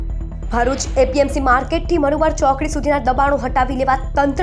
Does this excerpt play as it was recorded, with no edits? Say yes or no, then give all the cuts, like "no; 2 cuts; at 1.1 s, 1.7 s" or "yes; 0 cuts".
yes; 0 cuts